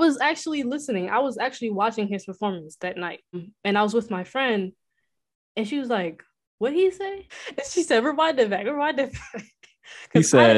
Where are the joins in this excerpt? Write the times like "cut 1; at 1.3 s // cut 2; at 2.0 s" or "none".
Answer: cut 1; at 3.5 s // cut 2; at 7.3 s